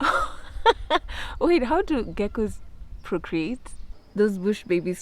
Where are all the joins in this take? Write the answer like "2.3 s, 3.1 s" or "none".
3.9 s